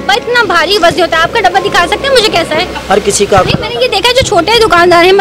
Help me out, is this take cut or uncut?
cut